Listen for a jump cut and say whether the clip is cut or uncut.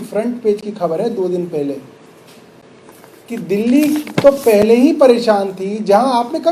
uncut